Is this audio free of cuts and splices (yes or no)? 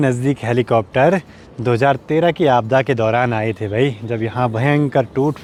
yes